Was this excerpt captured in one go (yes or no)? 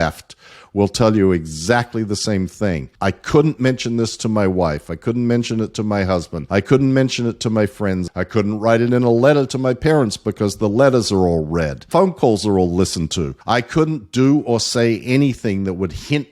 no